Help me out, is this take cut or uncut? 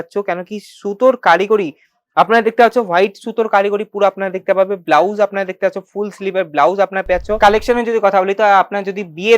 cut